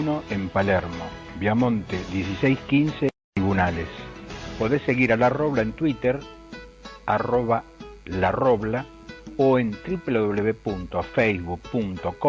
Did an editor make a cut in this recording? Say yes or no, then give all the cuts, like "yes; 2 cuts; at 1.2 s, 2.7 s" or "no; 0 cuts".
yes; 1 cut; at 3.2 s